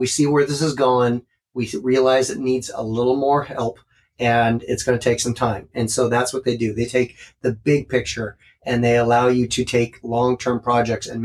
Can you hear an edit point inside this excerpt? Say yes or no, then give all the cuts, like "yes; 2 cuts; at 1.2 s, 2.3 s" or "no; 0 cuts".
no; 0 cuts